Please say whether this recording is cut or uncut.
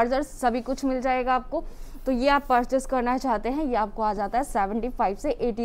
uncut